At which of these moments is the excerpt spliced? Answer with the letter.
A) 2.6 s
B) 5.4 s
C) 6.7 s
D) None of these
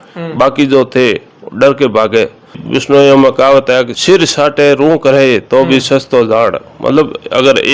A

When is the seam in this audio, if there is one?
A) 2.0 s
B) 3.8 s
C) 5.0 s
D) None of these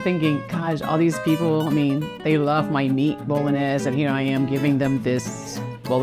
D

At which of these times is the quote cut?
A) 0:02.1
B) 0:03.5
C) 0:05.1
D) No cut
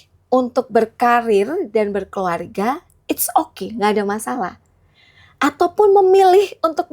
D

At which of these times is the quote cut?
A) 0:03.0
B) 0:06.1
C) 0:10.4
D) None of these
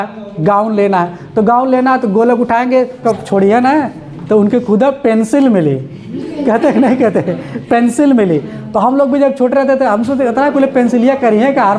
A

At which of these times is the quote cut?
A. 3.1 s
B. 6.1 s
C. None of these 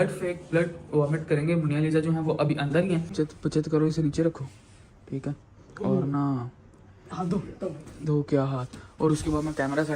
A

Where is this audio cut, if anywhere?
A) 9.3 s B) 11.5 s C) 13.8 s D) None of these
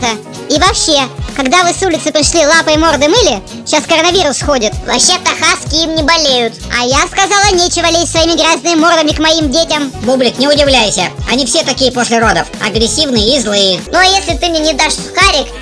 C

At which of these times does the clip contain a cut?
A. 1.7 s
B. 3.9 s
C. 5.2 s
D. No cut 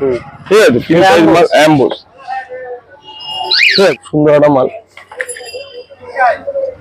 B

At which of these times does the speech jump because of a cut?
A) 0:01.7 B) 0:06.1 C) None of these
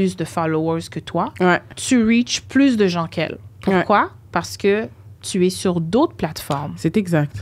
A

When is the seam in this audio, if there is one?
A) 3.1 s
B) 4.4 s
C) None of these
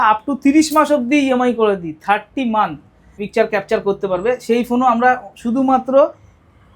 A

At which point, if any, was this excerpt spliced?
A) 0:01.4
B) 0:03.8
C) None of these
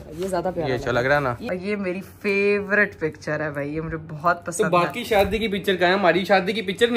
A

